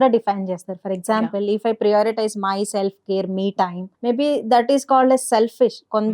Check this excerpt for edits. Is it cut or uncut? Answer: cut